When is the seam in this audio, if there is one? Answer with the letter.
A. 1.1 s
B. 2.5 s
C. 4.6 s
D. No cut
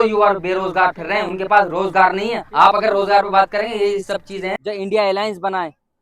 C